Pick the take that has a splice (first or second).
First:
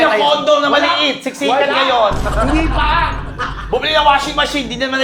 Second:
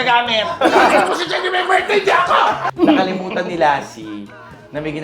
second